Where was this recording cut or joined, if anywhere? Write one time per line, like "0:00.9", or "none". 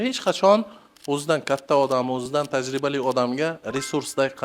0:02.3